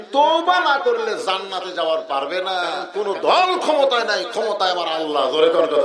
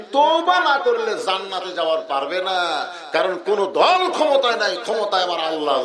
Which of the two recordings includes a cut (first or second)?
first